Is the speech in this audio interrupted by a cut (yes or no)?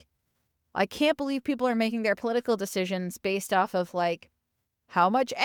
no